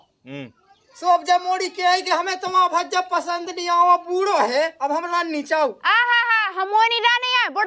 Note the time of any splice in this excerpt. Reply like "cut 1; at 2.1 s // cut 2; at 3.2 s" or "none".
cut 1; at 5.8 s